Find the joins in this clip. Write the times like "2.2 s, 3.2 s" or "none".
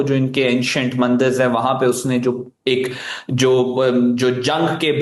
none